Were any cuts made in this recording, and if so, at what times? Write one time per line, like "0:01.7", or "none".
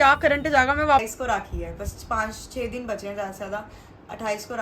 0:01.0

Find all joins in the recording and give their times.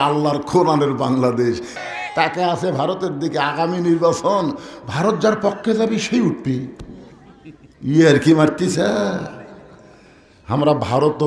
0:01.7

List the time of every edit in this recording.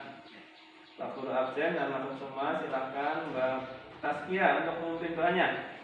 none

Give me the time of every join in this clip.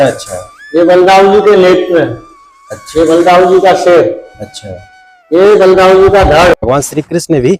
0:06.6

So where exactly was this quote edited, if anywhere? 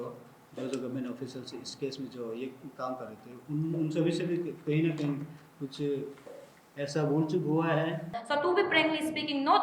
0:08.2

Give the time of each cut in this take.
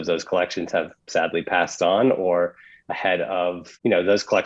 0:01.0

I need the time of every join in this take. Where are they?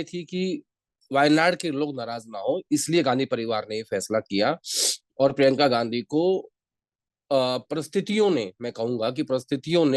none

